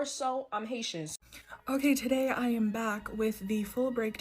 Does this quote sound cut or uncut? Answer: cut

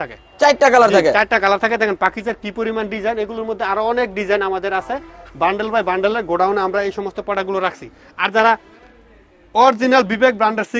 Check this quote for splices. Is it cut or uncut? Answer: uncut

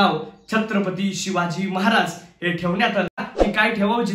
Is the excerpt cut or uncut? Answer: cut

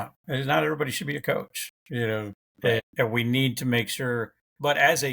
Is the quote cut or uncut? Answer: cut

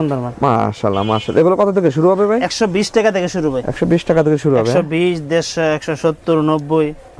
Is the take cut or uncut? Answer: uncut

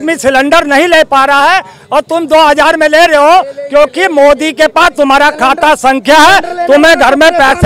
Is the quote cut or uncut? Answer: uncut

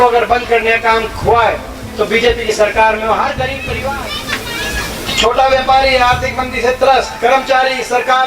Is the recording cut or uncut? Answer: cut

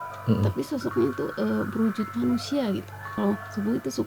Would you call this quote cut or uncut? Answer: cut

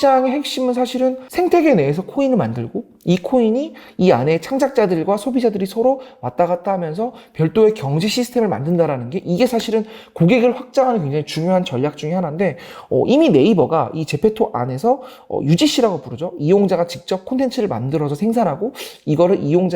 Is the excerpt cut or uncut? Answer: cut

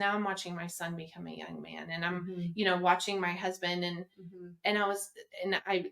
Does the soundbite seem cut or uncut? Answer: uncut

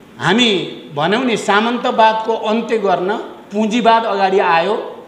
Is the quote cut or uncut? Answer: uncut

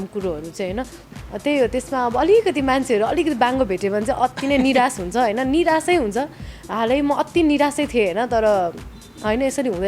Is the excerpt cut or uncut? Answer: cut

